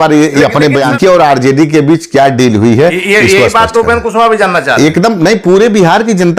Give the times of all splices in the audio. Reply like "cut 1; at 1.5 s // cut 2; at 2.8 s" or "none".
cut 1; at 1.0 s